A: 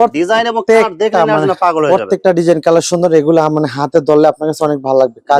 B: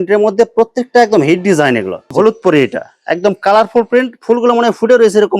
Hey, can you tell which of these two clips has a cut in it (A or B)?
B